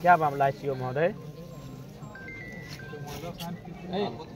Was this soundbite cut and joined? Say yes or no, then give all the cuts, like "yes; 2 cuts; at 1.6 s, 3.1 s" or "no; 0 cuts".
no; 0 cuts